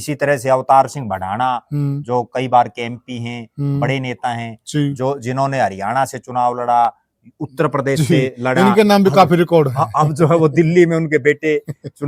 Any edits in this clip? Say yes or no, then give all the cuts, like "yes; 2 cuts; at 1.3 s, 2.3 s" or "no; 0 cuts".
no; 0 cuts